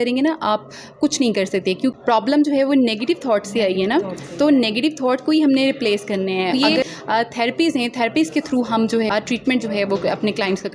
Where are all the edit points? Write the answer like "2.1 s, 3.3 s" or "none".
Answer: 2.0 s, 6.5 s, 9.1 s